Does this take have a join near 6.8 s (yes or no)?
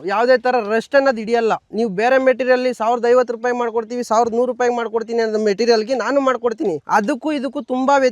yes